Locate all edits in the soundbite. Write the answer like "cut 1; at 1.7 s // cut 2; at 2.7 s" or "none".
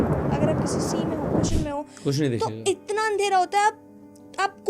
none